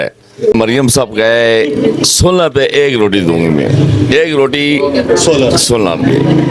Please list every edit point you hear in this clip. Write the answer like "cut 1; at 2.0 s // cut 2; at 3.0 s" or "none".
cut 1; at 1.8 s